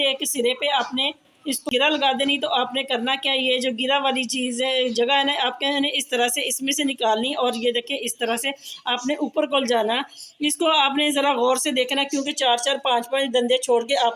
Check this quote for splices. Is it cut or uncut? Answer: cut